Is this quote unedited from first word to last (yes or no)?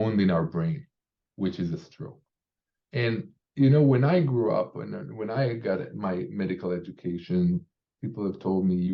yes